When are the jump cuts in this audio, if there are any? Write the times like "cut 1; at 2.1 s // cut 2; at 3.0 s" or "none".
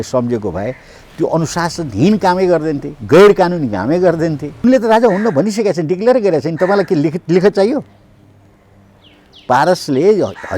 cut 1; at 4.6 s